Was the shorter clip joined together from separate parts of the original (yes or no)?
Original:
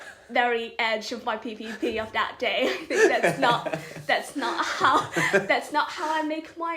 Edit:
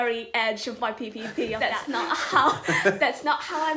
yes